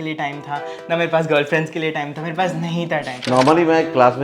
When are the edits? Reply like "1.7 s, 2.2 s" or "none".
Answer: 3.2 s